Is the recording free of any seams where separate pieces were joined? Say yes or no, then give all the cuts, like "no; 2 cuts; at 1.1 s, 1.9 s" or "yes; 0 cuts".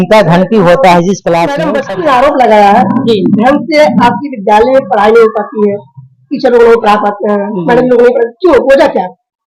no; 1 cut; at 1.8 s